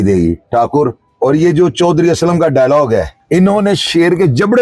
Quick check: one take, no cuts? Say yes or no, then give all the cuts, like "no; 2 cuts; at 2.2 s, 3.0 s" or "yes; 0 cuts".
no; 2 cuts; at 1.0 s, 3.2 s